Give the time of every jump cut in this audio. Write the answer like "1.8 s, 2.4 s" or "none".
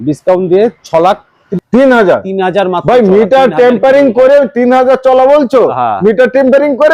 1.4 s